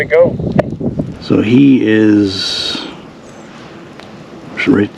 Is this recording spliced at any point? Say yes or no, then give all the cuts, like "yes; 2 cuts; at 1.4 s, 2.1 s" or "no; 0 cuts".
yes; 1 cut; at 1.1 s